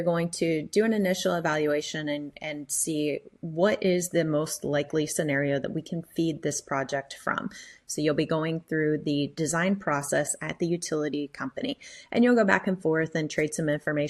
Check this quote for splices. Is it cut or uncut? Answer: cut